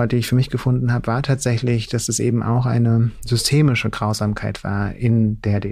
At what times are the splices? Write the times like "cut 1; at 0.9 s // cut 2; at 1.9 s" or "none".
none